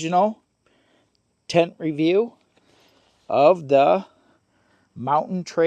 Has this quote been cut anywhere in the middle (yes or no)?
no